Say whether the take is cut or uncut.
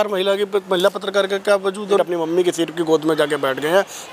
cut